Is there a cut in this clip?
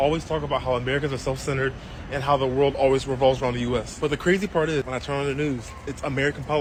no; 0 cuts

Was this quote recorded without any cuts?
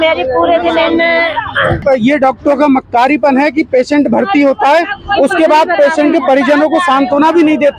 no; 1 cut; at 1.8 s

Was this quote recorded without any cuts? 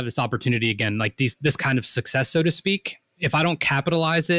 no; 1 cut; at 3.2 s

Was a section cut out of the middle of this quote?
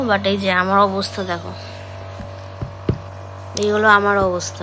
no; 0 cuts

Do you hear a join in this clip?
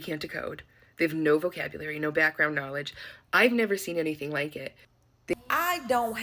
yes; 1 cut; at 5.3 s

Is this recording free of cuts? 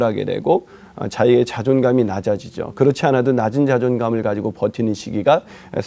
yes; 0 cuts

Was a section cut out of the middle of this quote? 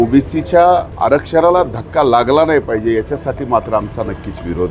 yes; 1 cut; at 0.9 s

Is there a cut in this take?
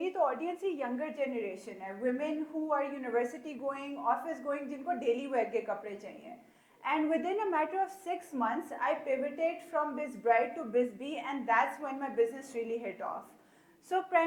no; 0 cuts

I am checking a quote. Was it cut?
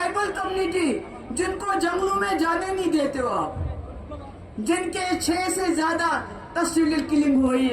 no; 0 cuts

